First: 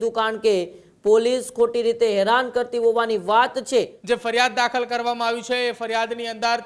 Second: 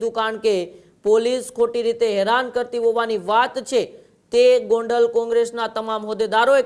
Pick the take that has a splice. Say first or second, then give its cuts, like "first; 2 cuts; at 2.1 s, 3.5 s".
first; 1 cut; at 4.0 s